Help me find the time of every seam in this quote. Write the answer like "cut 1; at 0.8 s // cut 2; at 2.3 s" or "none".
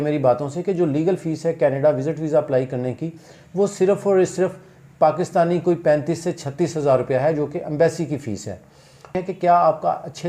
cut 1; at 9.2 s